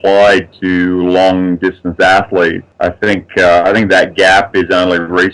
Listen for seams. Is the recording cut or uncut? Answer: cut